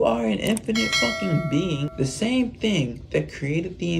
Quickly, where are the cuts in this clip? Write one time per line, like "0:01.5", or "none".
0:01.9